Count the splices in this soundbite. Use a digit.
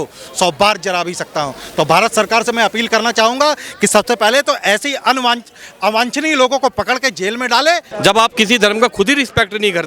1